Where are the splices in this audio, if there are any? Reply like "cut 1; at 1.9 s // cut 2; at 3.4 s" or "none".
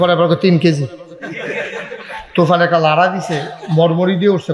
none